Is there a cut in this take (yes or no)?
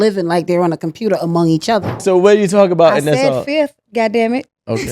yes